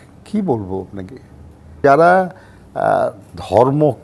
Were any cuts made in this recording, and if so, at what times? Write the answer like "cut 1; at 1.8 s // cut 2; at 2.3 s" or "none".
cut 1; at 1.8 s